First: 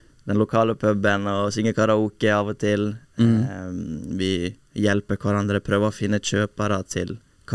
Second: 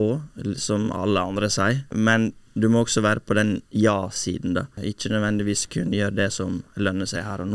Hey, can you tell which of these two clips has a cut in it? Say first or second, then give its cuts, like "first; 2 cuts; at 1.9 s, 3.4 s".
second; 2 cuts; at 1.9 s, 4.7 s